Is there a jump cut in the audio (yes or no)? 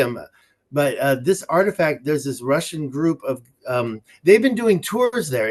no